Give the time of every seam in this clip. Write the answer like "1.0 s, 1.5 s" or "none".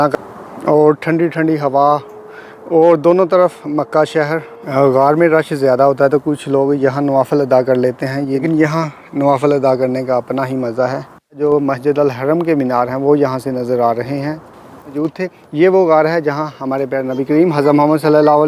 4.6 s, 8.4 s, 11.4 s, 15.0 s